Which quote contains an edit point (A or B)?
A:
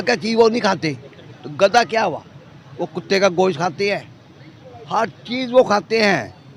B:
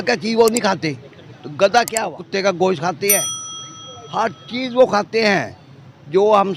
B